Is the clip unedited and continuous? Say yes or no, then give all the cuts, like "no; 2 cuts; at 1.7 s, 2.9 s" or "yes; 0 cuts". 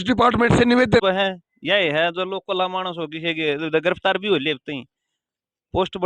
no; 1 cut; at 1.0 s